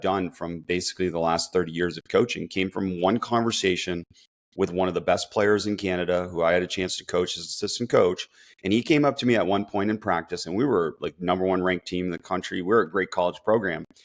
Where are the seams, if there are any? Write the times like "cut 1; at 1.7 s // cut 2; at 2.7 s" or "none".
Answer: none